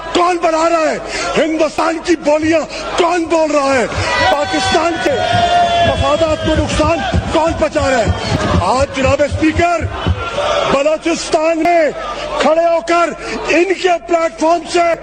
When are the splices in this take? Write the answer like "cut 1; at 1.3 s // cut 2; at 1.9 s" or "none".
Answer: none